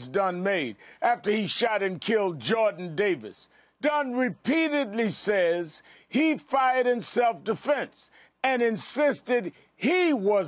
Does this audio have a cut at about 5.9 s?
no; 1 cut; at 9.3 s

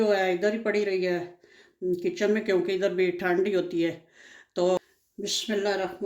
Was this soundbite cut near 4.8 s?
yes; 1 cut; at 4.8 s

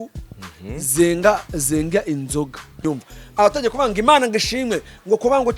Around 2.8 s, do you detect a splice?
yes; 1 cut; at 2.8 s

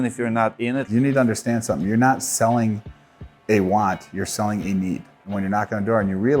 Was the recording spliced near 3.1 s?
no; 2 cuts; at 0.9 s, 5.2 s

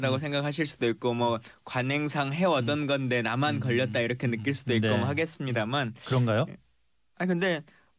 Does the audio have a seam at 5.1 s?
no; 1 cut; at 2.6 s

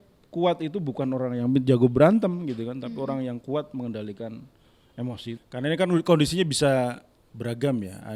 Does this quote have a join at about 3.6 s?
no; 1 cut; at 5.4 s

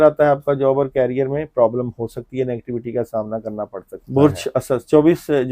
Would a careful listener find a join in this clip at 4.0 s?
yes; 1 cut; at 4.0 s

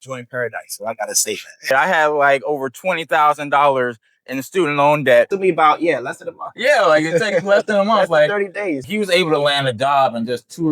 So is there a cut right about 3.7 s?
no; 3 cuts; at 1.7 s, 5.3 s, 8.8 s

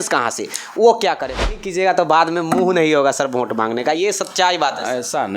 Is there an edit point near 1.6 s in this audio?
yes; 1 cut; at 1.6 s

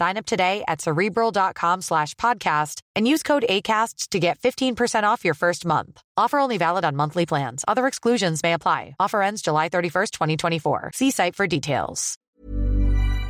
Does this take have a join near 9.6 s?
no; 1 cut; at 12.1 s

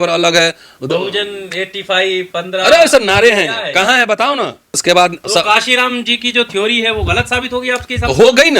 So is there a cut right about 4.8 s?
yes; 1 cut; at 4.8 s

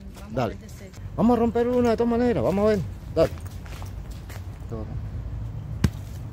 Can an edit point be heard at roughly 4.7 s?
yes; 2 cuts; at 0.8 s, 4.7 s

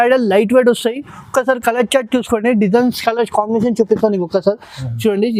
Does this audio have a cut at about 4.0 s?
no; 0 cuts

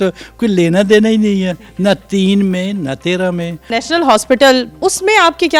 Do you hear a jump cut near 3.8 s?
yes; 2 cuts; at 3.8 s, 4.8 s

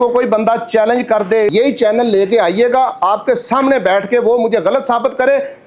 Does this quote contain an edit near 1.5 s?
yes; 1 cut; at 1.5 s

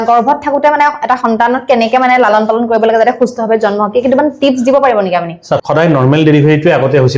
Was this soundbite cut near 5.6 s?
yes; 1 cut; at 5.6 s

